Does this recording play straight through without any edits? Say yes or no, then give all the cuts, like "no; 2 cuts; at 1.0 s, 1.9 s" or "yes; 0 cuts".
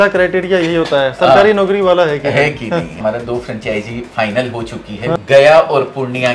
no; 2 cuts; at 3.0 s, 5.2 s